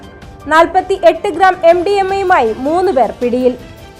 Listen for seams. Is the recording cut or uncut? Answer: uncut